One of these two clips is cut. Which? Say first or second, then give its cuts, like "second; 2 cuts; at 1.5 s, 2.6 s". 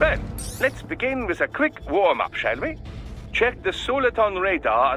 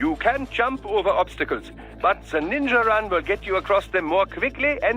first; 1 cut; at 2.3 s